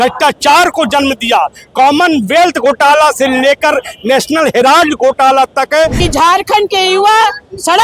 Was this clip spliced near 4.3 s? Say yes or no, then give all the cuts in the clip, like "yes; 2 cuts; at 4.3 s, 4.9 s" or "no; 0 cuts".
no; 1 cut; at 6.0 s